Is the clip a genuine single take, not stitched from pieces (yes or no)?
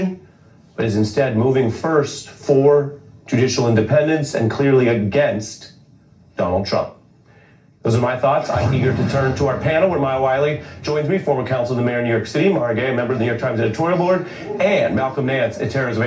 yes